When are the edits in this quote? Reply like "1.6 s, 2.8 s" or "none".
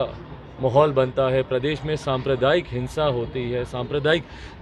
none